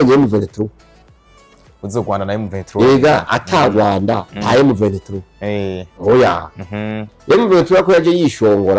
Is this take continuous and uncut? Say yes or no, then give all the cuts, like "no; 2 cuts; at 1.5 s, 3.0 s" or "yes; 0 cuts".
no; 1 cut; at 7.0 s